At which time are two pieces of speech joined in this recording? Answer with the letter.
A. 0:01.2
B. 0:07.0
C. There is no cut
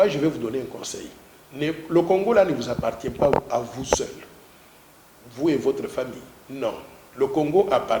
C